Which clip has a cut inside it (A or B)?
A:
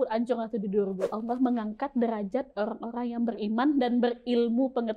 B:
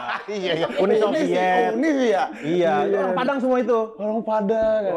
A